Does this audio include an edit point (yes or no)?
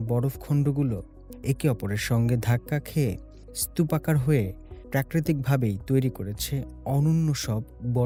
no